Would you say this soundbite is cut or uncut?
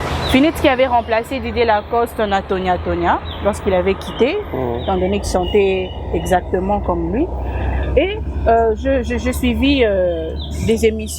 uncut